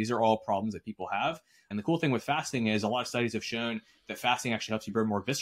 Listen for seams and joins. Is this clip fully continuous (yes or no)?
no